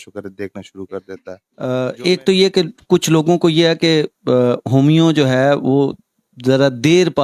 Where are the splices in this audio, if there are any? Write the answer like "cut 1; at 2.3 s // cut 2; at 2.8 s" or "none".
cut 1; at 1.1 s